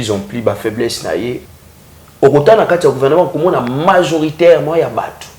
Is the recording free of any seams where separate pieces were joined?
no; 1 cut; at 1.4 s

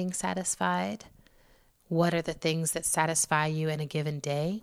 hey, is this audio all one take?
yes; 0 cuts

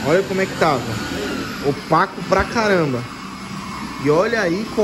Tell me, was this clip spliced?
no; 0 cuts

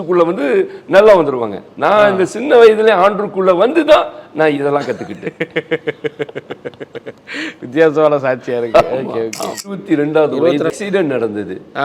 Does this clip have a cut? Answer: yes; 2 cuts; at 9.6 s, 10.7 s

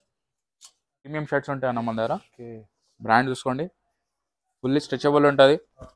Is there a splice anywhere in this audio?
yes; 1 cut; at 1.1 s

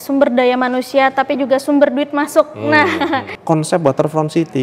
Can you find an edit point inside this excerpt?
yes; 1 cut; at 3.3 s

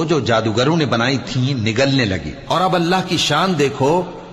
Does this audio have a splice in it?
yes; 1 cut; at 2.3 s

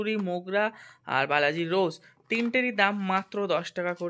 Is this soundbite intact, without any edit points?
yes; 0 cuts

